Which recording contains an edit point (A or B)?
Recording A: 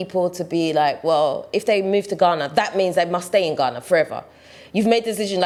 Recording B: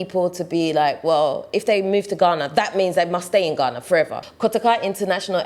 B